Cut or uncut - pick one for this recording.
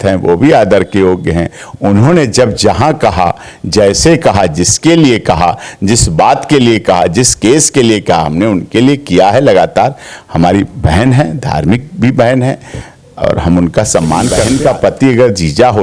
cut